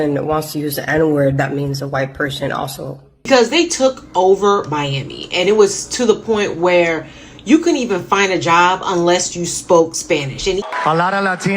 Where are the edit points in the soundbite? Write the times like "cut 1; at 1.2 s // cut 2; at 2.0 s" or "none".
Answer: cut 1; at 3.3 s // cut 2; at 10.6 s